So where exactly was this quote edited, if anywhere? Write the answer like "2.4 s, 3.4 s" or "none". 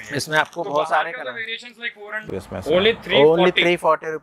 2.1 s